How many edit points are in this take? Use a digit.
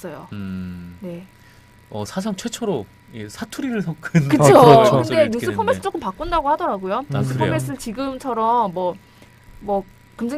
1